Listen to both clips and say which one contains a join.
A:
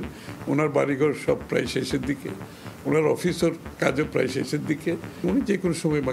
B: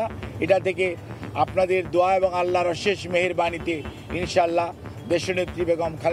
A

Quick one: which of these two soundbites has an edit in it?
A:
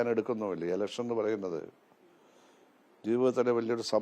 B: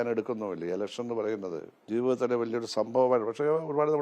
B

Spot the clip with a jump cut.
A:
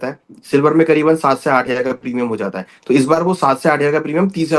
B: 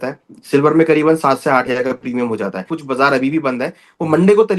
B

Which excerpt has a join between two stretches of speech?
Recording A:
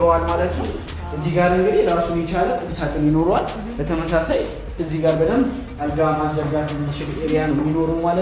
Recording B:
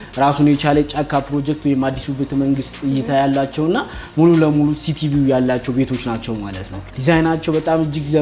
B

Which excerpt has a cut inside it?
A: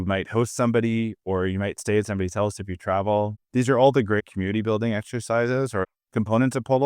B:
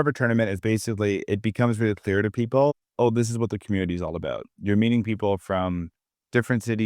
A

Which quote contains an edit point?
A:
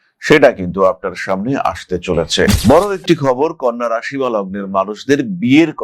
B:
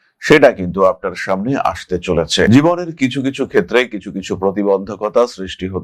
A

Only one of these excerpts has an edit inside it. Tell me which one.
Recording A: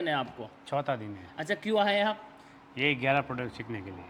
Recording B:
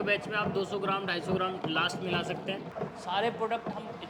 B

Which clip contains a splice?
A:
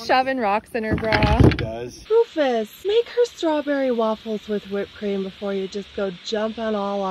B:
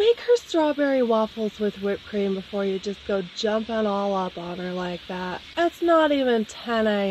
A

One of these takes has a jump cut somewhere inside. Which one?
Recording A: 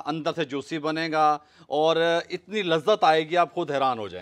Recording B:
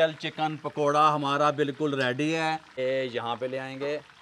B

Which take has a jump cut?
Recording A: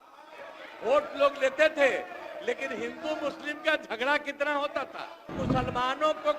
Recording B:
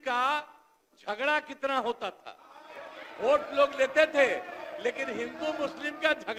A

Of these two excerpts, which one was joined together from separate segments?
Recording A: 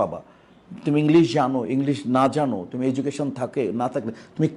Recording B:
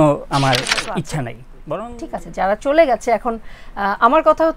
B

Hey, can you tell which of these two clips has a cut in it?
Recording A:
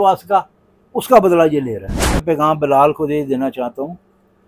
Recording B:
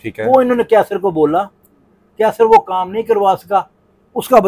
A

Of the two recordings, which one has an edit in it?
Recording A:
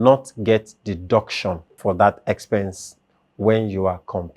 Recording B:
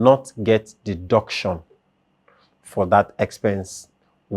A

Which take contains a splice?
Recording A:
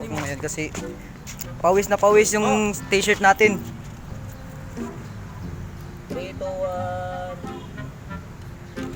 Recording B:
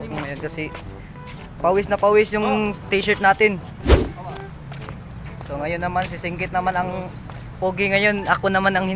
B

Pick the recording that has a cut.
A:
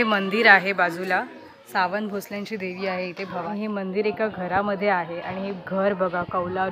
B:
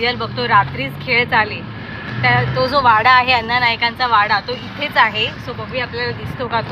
A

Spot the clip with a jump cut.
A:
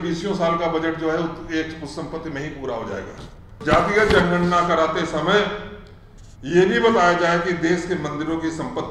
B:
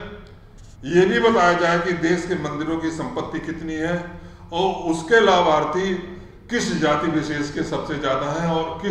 A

